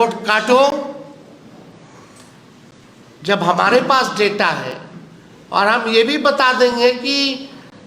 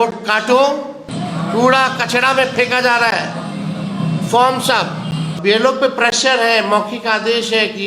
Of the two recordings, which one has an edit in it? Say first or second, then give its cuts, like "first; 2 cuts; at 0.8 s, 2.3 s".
second; 1 cut; at 1.1 s